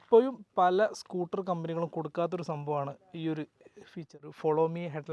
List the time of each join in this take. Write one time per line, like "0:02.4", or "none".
0:04.2